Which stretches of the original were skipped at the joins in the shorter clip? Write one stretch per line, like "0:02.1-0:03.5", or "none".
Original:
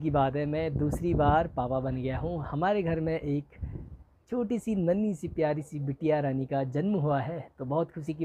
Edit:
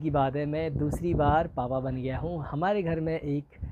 none